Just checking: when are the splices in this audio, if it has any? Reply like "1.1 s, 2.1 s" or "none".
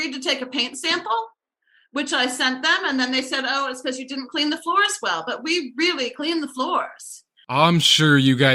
none